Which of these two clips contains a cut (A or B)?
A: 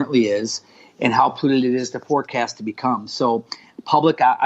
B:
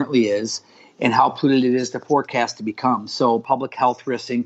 B